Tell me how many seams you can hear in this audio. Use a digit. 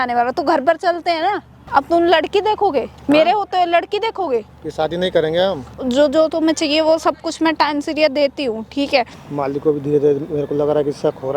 3